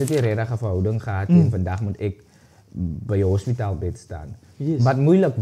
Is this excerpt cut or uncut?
uncut